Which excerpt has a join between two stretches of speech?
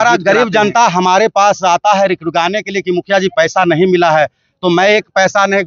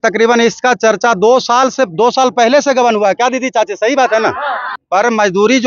second; 1 cut; at 4.7 s

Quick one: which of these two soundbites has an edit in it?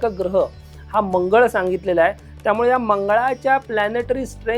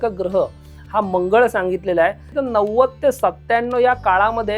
second; 1 cut; at 2.3 s

